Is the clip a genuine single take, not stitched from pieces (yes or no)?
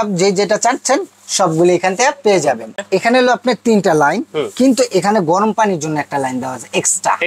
no